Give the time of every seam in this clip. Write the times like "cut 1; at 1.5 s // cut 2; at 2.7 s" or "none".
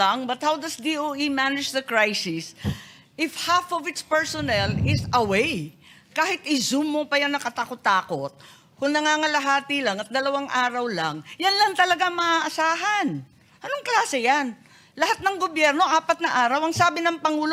none